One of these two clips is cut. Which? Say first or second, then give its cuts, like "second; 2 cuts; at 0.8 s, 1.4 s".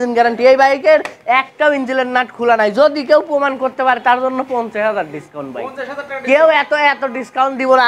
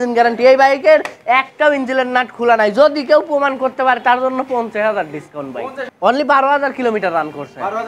second; 1 cut; at 5.8 s